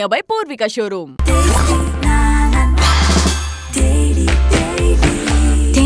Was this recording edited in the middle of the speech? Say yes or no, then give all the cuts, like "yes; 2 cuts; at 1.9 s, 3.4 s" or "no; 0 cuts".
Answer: no; 0 cuts